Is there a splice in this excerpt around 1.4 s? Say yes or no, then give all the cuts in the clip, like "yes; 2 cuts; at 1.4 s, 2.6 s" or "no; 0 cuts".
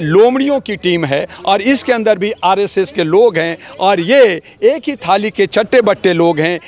no; 0 cuts